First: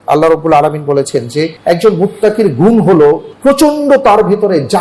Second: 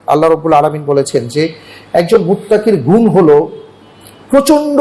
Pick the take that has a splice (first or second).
first